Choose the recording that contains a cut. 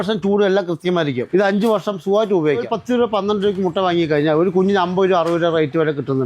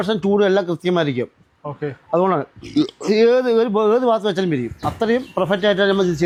first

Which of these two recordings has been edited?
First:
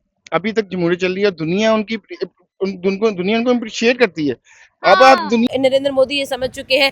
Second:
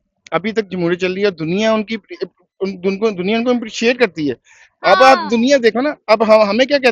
first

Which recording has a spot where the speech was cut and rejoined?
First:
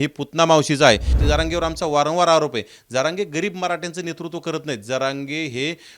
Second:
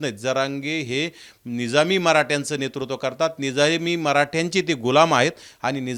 first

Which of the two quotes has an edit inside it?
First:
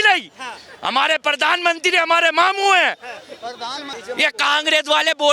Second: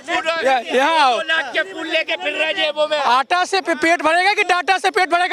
first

